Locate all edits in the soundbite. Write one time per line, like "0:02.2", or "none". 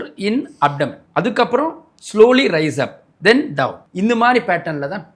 0:01.0
0:03.8